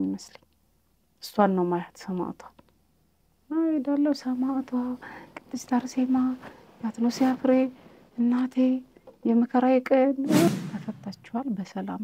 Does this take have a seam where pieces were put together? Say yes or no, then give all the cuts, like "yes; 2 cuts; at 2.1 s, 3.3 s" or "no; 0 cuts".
yes; 1 cut; at 10.5 s